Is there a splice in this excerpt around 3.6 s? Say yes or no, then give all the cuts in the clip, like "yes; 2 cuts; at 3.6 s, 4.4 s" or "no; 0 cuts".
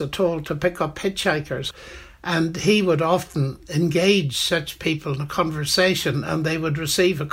no; 1 cut; at 1.7 s